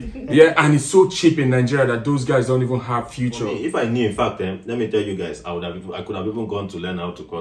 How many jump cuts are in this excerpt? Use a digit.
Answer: 1